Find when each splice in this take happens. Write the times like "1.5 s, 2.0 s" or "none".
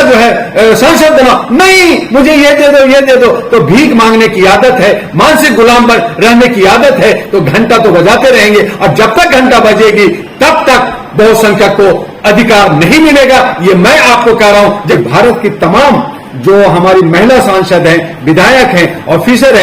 14.9 s